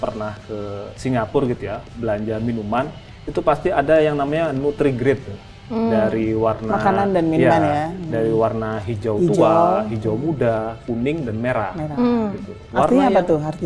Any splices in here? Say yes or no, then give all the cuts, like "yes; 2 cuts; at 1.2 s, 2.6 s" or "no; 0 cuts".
no; 0 cuts